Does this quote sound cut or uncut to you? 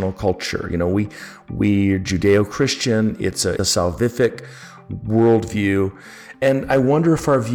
cut